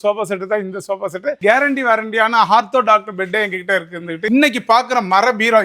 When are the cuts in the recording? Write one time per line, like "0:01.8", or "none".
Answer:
0:01.4
0:04.2

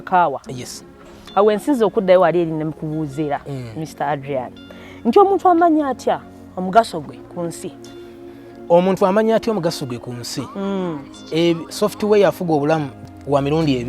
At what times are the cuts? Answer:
0:13.0

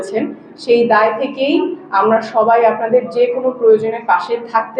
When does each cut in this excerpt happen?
none

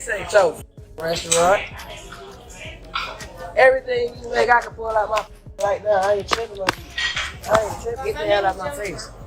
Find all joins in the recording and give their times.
none

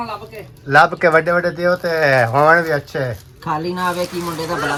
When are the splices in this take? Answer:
none

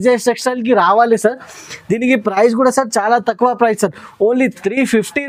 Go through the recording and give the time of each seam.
none

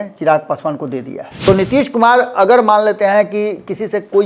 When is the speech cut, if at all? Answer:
0:01.2

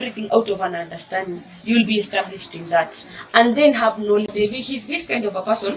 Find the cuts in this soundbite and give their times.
0:04.3

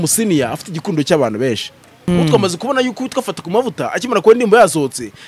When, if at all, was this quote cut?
0:02.1

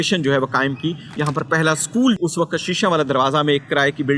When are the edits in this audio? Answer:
0:01.0
0:02.2

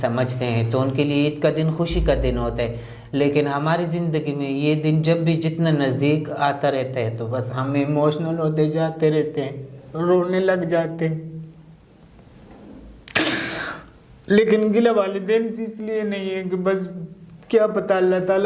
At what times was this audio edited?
none

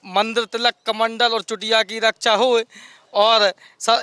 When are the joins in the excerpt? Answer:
none

